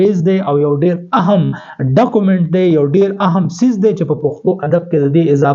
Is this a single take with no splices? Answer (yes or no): yes